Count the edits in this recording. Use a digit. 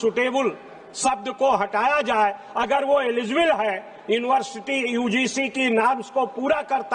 0